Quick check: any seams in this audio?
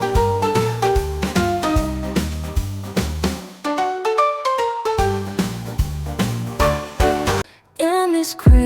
yes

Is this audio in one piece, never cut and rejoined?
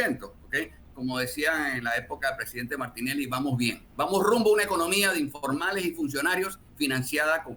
yes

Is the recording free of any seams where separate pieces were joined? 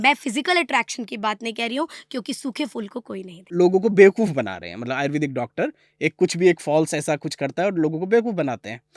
no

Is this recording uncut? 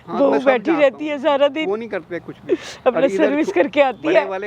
yes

